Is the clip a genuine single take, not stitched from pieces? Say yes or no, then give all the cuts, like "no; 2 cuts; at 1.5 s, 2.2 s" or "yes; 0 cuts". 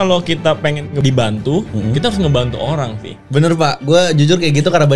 no; 1 cut; at 0.9 s